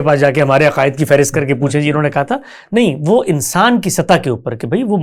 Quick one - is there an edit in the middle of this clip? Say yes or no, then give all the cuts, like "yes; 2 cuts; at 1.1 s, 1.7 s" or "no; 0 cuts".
no; 0 cuts